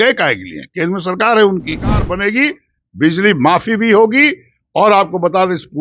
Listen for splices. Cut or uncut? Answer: cut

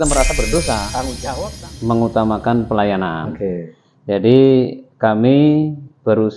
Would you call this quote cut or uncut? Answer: cut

